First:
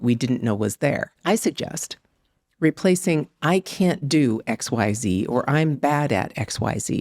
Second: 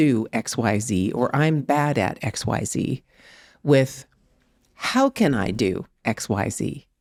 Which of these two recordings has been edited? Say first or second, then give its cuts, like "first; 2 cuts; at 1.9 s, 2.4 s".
first; 1 cut; at 1.1 s